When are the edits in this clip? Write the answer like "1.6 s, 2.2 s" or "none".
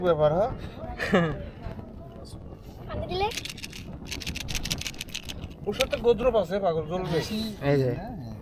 3.3 s